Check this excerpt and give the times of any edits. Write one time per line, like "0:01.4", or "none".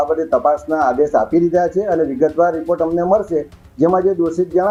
none